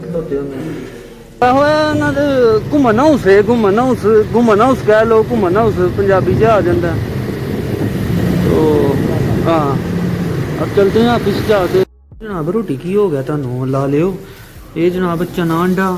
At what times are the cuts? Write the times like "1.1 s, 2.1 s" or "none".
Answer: 1.4 s, 11.9 s